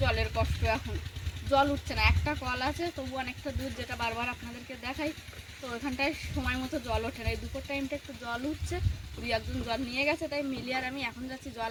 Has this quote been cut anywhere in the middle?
no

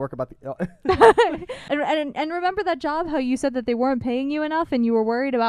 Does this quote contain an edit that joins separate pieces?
yes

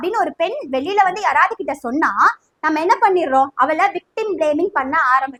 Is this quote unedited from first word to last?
yes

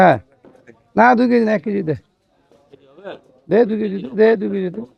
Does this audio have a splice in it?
no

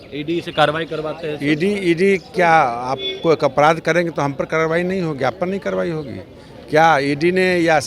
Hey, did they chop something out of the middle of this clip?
no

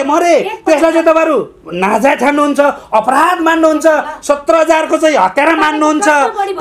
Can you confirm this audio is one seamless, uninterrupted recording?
yes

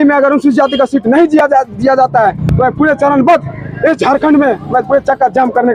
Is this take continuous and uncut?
yes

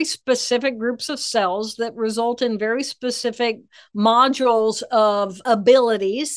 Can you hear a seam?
yes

